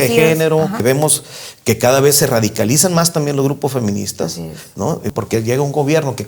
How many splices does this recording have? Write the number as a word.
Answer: two